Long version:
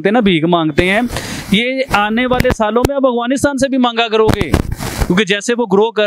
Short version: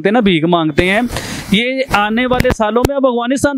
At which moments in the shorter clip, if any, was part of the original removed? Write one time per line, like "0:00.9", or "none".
none